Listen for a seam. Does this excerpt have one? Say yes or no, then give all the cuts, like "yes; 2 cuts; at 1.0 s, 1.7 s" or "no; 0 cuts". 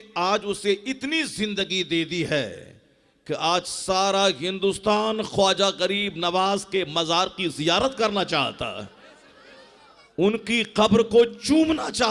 no; 0 cuts